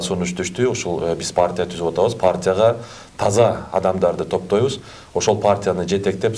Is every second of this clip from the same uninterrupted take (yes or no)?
yes